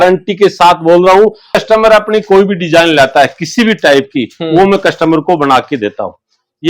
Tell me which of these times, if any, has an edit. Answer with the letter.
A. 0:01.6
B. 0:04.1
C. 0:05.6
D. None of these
A